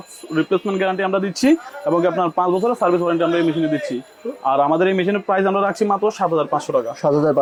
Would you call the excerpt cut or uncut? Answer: uncut